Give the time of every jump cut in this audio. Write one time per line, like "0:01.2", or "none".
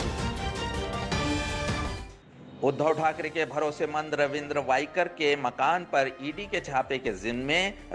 0:02.0